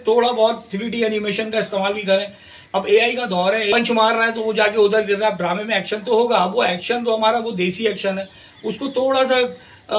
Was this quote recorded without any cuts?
no; 2 cuts; at 2.6 s, 3.7 s

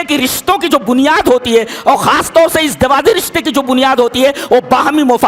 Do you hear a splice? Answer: no; 0 cuts

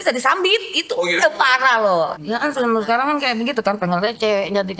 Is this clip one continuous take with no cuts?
no; 1 cut; at 2.1 s

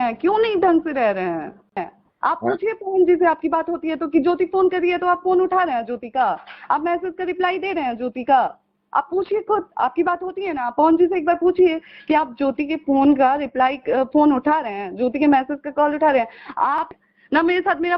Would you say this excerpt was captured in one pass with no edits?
no; 2 cuts; at 2.0 s, 16.9 s

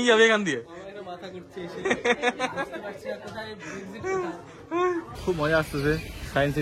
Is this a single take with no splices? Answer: no; 1 cut; at 5.1 s

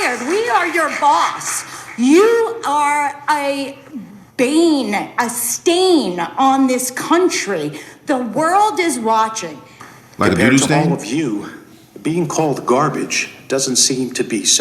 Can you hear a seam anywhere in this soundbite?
no; 0 cuts

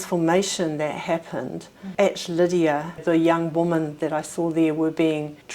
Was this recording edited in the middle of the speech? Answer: yes; 1 cut; at 3.0 s

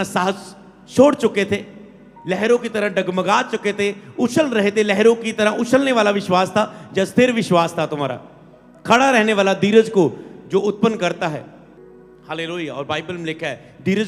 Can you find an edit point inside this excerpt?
no; 0 cuts

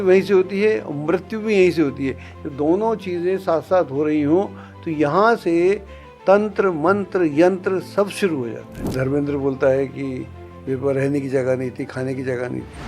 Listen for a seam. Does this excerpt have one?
yes; 1 cut; at 8.9 s

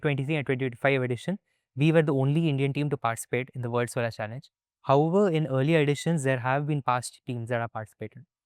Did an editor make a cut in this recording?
no; 0 cuts

